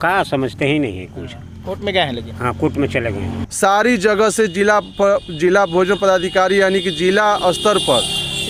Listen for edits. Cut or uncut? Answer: uncut